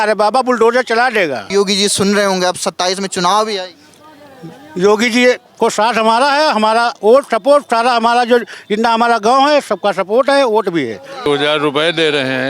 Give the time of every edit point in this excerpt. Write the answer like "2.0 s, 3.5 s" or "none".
1.4 s, 11.3 s